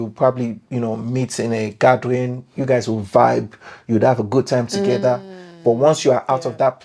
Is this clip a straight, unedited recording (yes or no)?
yes